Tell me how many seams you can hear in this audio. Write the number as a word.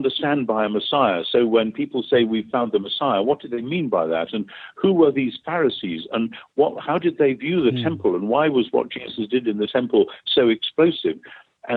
zero